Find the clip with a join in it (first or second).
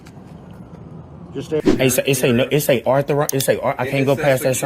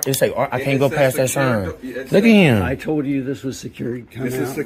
first